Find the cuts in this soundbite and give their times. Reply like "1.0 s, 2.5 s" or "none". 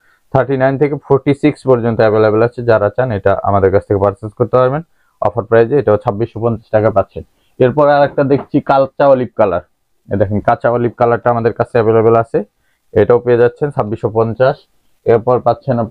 none